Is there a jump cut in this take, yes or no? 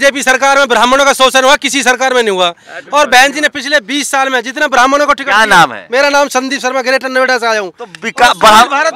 no